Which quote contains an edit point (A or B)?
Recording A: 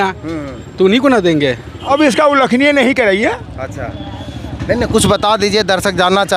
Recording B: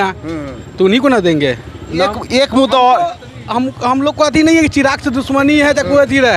A